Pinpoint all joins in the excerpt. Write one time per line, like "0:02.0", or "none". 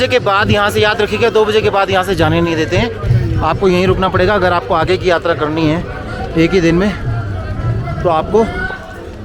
none